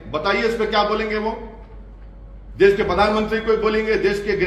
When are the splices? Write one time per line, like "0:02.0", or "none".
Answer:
none